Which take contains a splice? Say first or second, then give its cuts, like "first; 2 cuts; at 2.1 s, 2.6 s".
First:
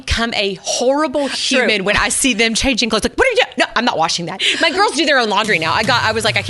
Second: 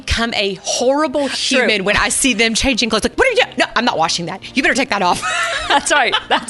first; 1 cut; at 4.4 s